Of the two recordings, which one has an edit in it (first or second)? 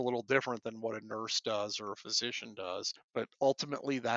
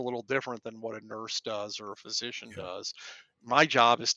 first